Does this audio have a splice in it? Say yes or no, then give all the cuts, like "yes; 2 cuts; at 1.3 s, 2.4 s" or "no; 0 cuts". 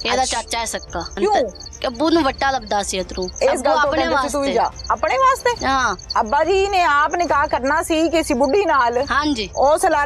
yes; 3 cuts; at 1.1 s, 3.2 s, 6.0 s